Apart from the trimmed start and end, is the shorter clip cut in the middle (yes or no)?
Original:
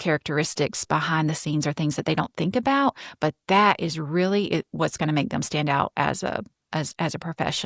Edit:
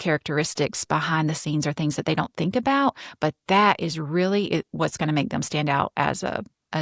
no